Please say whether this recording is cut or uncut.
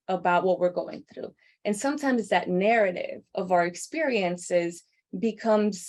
uncut